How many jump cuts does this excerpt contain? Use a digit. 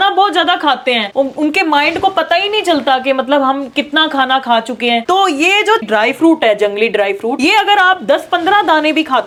0